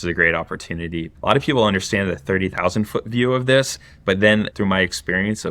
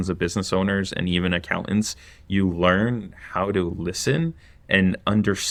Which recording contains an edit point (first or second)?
first